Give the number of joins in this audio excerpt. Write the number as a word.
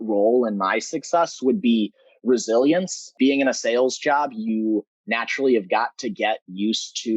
one